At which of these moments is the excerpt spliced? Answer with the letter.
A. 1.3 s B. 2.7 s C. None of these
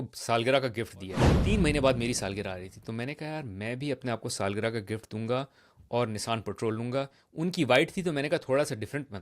A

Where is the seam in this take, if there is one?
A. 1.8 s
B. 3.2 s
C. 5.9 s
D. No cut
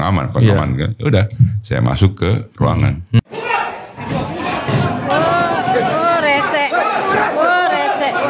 B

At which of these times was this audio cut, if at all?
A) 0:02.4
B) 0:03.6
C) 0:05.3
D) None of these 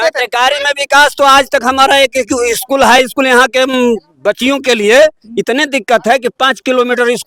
D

